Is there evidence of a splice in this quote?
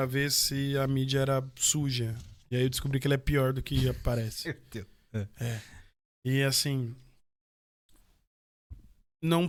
no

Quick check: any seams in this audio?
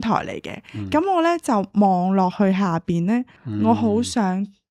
yes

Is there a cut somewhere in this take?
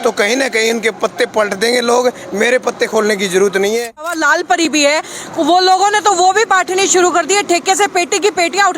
yes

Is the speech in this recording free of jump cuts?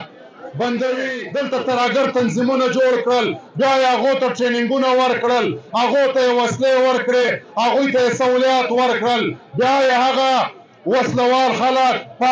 no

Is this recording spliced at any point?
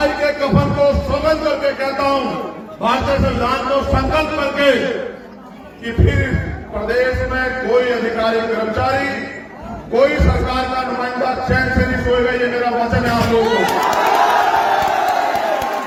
no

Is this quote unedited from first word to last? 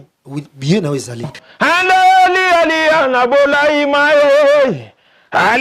no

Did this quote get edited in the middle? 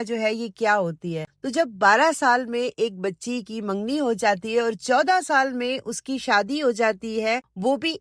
no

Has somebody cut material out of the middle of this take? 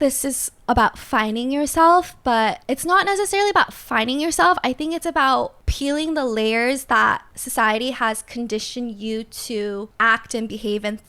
yes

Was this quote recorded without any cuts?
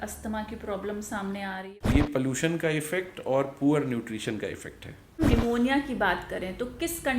no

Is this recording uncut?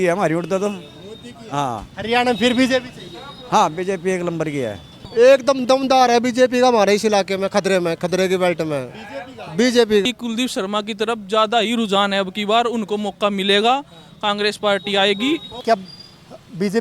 no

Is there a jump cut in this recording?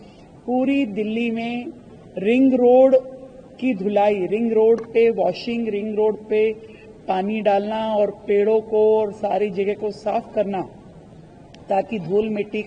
no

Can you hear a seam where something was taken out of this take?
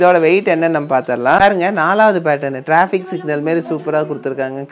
yes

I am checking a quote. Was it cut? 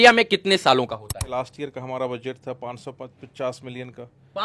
yes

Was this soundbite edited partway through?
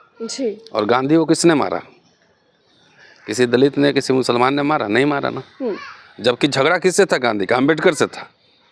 no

